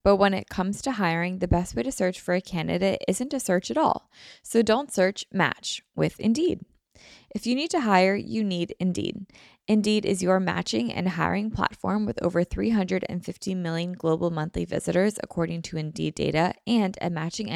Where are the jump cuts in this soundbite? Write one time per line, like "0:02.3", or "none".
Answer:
none